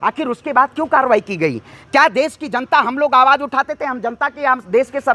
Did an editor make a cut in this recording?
no; 0 cuts

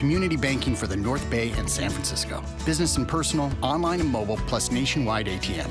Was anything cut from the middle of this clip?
no; 0 cuts

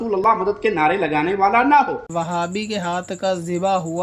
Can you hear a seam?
yes; 1 cut; at 2.0 s

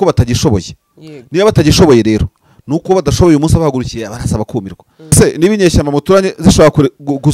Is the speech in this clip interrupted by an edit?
yes; 1 cut; at 5.1 s

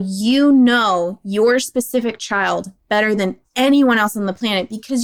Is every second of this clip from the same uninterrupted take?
yes; 0 cuts

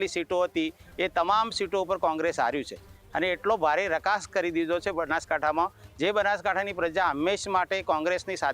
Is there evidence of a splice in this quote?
no; 0 cuts

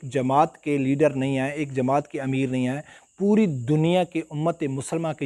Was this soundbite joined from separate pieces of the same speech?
no; 0 cuts

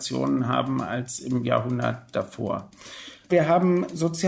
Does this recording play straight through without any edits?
no; 1 cut; at 3.3 s

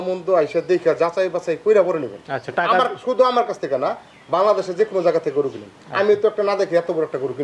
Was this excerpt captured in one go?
yes; 0 cuts

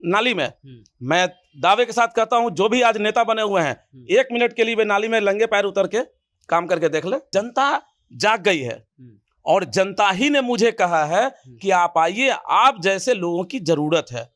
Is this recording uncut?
no; 1 cut; at 7.2 s

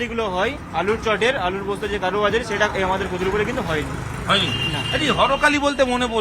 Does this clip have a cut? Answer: no; 0 cuts

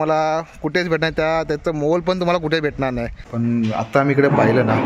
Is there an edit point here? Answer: yes; 1 cut; at 3.2 s

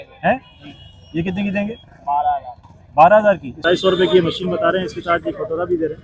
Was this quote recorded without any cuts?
no; 1 cut; at 3.5 s

